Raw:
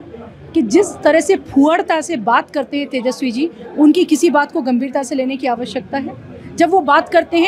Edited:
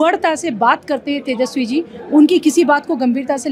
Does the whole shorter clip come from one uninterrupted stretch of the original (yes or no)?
yes